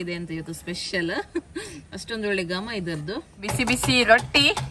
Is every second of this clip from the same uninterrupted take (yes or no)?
no